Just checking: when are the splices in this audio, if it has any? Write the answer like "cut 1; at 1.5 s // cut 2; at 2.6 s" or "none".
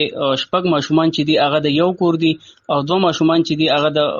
none